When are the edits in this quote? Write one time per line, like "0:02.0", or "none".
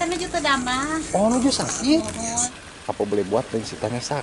0:02.5